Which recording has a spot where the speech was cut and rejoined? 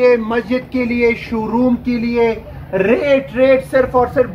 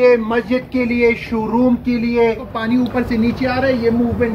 second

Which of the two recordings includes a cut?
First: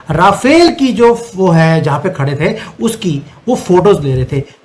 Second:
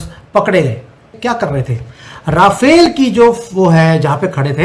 second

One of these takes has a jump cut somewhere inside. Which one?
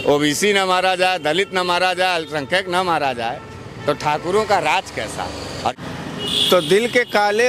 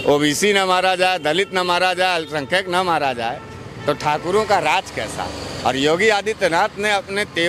first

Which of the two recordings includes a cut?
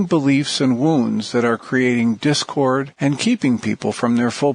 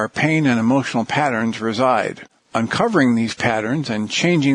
first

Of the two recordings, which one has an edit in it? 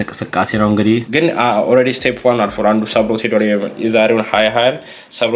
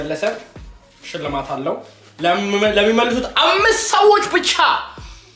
first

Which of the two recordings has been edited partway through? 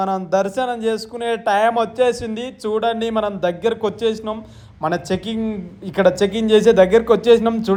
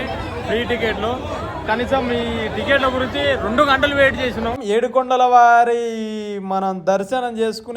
second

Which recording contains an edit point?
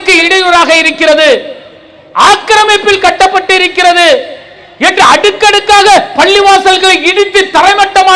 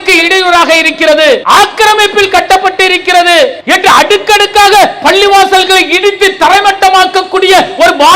second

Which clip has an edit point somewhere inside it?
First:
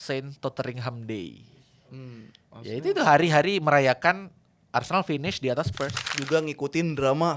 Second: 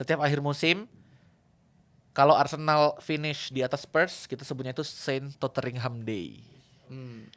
first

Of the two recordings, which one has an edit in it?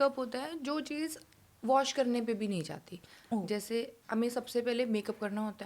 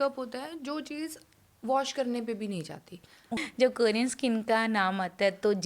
second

